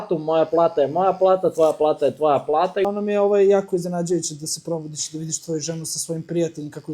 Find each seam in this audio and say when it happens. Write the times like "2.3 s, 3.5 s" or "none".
2.9 s